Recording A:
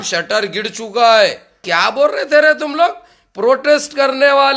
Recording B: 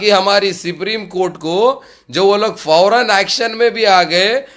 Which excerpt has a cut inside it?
A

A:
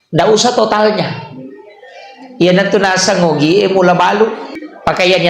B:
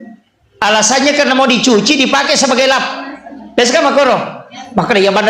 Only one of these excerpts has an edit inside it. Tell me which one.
A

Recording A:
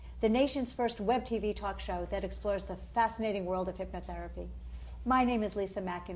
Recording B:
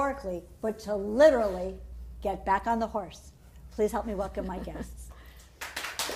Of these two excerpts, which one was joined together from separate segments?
A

